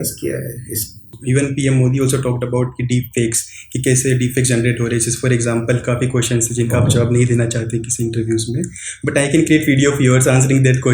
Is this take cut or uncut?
cut